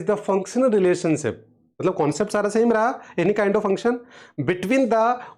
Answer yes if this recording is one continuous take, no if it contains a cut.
yes